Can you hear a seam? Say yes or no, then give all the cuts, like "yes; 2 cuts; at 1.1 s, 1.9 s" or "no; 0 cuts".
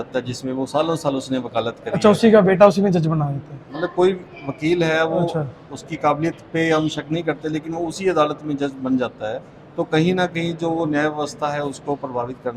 no; 0 cuts